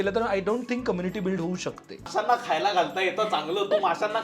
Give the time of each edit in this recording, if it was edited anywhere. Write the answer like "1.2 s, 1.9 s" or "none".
2.1 s